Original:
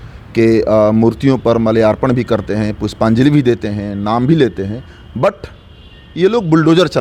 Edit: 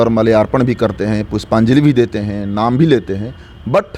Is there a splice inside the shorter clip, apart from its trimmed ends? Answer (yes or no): no